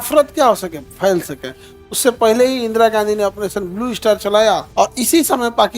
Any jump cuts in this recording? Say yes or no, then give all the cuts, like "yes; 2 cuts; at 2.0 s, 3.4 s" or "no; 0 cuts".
yes; 1 cut; at 4.7 s